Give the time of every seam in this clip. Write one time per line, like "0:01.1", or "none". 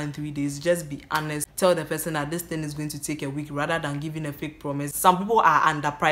0:01.5
0:04.9

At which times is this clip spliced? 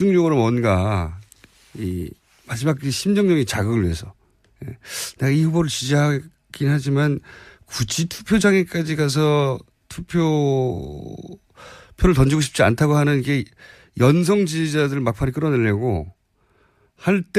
none

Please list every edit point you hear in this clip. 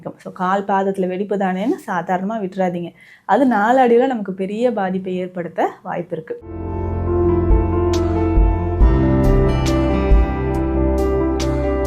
0:06.5

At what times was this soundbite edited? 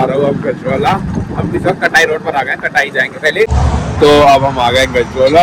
0:03.5

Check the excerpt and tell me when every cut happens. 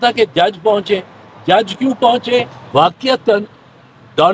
0:02.6

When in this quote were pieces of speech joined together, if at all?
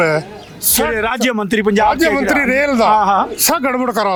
none

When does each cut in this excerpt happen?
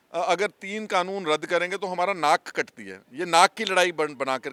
none

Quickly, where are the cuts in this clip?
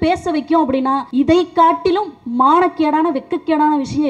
0:01.1

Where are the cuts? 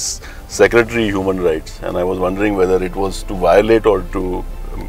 none

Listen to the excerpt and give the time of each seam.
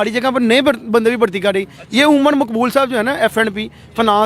none

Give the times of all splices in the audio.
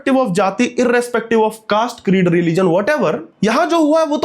0:03.3

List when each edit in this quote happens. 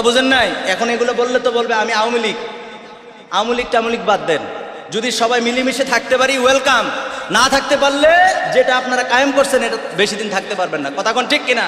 none

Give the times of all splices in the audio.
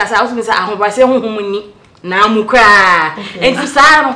none

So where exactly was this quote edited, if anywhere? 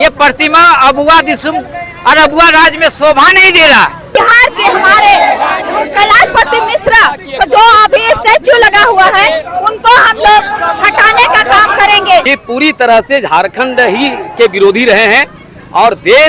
0:04.2
0:12.2

